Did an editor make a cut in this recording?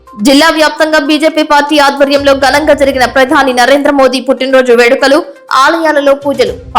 no; 0 cuts

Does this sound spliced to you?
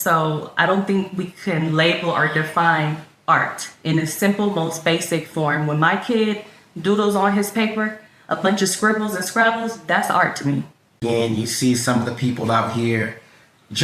yes; 1 cut; at 10.9 s

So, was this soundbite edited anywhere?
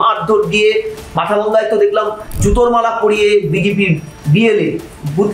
yes; 1 cut; at 2.4 s

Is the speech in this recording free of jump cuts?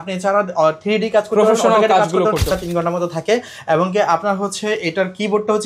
no; 1 cut; at 2.5 s

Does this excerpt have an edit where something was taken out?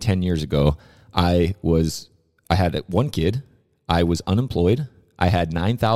no; 0 cuts

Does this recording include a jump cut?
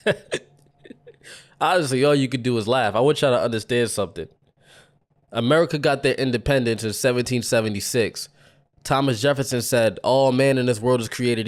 no; 0 cuts

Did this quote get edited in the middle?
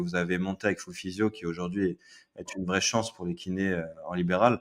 no; 0 cuts

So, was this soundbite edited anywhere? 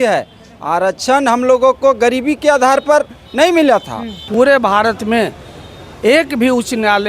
yes; 1 cut; at 4.2 s

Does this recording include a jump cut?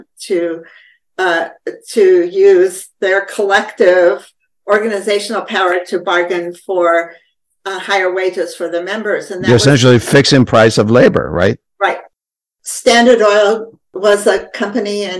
yes; 2 cuts; at 12.2 s, 13.9 s

